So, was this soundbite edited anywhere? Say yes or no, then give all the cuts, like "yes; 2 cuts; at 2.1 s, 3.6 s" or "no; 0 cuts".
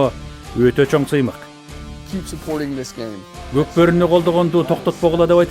yes; 2 cuts; at 1.5 s, 3.3 s